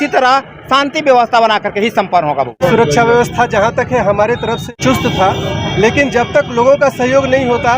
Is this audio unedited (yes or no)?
no